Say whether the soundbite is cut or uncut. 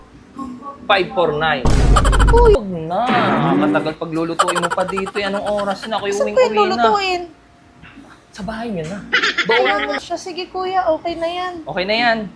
cut